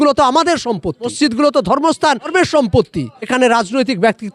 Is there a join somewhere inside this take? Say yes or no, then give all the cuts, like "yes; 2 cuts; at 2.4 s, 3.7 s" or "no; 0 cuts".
yes; 3 cuts; at 1.1 s, 2.3 s, 3.3 s